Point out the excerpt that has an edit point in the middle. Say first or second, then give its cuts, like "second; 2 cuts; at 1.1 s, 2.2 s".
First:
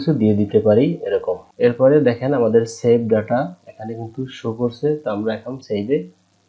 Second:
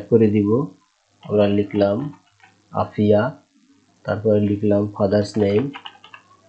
first; 1 cut; at 1.4 s